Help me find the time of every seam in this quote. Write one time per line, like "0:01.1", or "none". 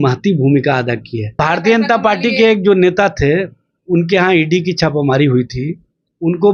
0:01.3